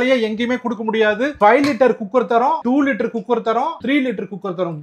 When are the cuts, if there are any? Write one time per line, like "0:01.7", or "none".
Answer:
0:01.3